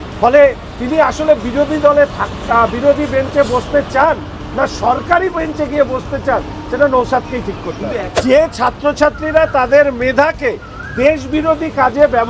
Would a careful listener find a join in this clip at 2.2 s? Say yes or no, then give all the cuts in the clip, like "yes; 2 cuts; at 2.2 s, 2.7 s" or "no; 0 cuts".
no; 1 cut; at 8.1 s